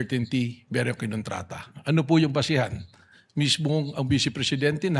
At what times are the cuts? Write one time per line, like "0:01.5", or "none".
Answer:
0:03.4